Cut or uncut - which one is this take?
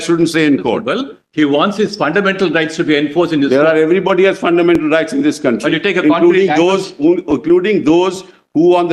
uncut